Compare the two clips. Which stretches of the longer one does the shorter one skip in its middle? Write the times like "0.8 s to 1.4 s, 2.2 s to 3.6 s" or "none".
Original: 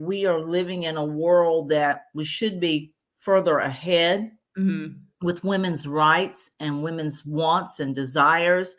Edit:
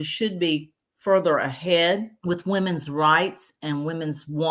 4.3 s to 5.1 s